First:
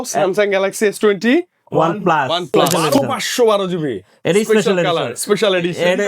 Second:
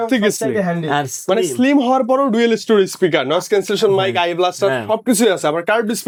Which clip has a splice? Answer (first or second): first